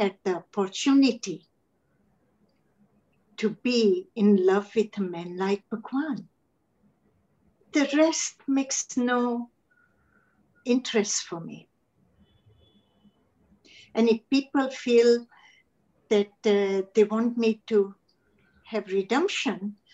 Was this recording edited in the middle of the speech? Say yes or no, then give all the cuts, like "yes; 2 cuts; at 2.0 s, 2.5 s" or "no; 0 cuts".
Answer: no; 0 cuts